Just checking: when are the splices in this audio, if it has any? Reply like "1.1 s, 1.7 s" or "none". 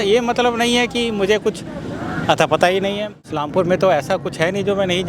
3.2 s